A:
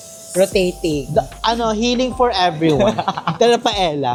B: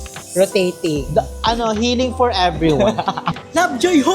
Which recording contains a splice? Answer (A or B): B